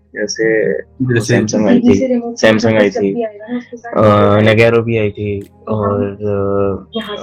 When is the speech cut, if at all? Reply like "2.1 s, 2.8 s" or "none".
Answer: none